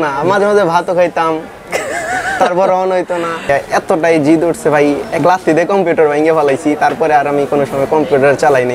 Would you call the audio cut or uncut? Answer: cut